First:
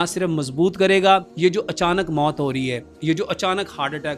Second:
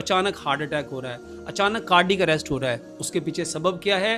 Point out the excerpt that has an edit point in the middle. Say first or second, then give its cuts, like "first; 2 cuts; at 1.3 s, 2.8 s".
first; 1 cut; at 1.3 s